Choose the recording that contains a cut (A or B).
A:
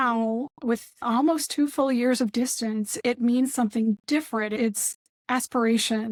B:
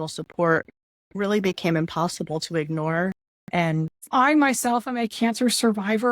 B